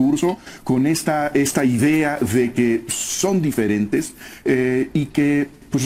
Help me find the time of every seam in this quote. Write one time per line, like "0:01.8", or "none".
none